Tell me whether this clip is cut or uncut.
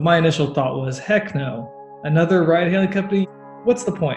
cut